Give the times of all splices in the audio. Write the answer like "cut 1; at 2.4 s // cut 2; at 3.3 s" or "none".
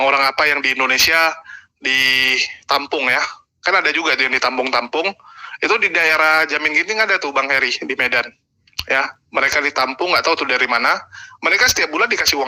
none